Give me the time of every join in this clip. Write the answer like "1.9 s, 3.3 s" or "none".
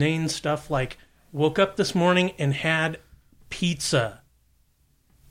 none